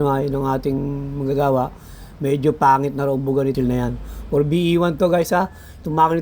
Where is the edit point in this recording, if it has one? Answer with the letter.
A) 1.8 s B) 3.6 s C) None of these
B